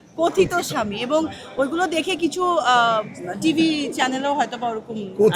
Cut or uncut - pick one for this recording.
uncut